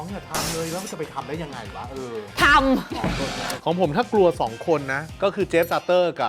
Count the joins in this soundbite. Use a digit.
2